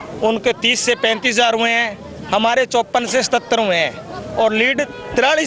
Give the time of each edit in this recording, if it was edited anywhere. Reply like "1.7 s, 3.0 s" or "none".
none